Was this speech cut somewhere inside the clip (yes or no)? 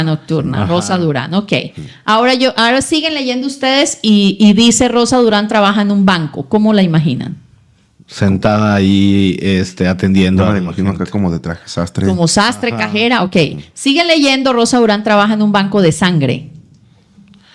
no